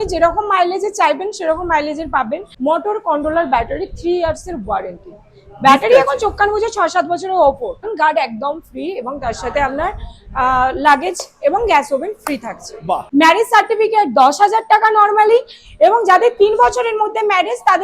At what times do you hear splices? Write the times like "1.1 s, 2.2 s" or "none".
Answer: 2.5 s, 7.9 s, 13.0 s